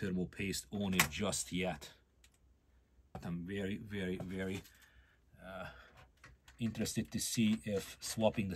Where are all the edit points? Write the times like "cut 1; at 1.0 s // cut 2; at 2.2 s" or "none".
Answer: cut 1; at 3.2 s